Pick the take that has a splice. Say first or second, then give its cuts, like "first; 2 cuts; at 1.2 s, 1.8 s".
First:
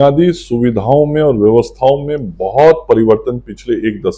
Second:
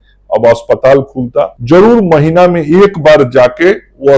second; 1 cut; at 1.6 s